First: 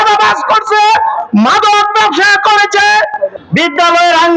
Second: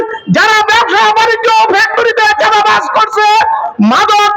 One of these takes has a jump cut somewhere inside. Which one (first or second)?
first